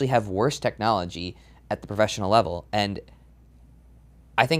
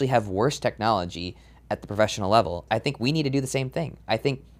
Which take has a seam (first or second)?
second